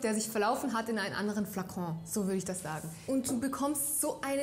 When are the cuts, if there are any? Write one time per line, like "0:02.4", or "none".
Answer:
0:03.0